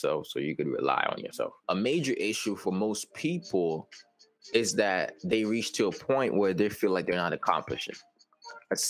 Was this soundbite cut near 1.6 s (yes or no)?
yes